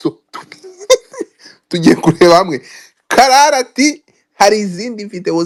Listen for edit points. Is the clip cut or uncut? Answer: uncut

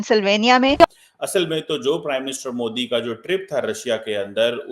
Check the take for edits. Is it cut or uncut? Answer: cut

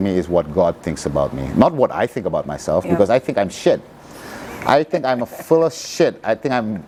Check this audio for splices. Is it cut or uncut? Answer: uncut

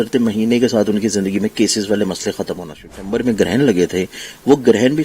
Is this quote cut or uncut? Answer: cut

